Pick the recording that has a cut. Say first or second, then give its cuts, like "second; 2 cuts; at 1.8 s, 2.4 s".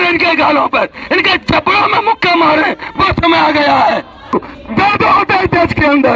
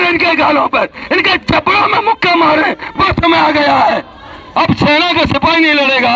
first; 1 cut; at 4.2 s